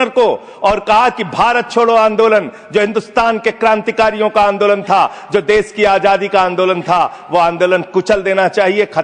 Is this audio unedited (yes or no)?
yes